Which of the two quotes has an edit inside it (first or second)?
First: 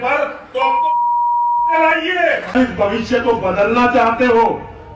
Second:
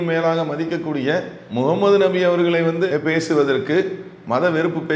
second